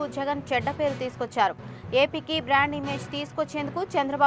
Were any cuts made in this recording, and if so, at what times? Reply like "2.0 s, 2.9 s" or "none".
none